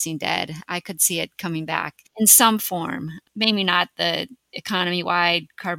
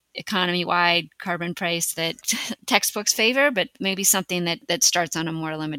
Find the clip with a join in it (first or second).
second